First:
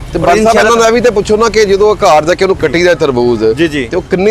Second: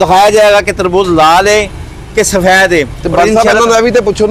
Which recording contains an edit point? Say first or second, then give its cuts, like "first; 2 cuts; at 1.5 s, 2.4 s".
first; 1 cut; at 2.6 s